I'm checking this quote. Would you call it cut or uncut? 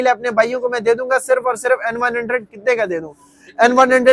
uncut